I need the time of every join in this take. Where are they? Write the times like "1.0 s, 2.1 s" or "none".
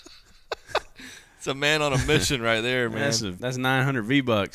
3.3 s